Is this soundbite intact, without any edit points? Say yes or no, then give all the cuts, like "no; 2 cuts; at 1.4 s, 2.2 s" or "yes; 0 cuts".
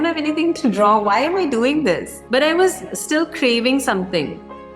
no; 1 cut; at 2.1 s